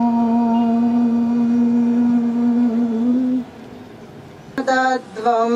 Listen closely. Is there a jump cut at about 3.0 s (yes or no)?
no